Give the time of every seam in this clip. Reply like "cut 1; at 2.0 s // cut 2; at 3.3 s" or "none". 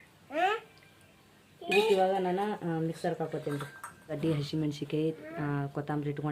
cut 1; at 4.2 s